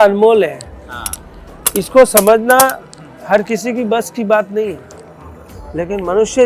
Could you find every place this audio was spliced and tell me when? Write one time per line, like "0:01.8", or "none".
none

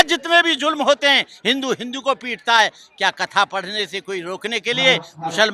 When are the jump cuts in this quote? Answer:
none

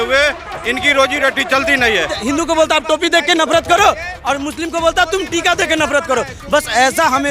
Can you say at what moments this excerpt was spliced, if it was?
0:02.2

